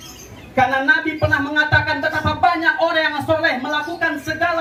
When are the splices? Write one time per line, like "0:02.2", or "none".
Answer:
none